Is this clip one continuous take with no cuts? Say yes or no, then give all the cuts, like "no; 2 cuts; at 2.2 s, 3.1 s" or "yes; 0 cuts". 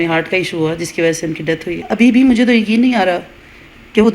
no; 1 cut; at 1.8 s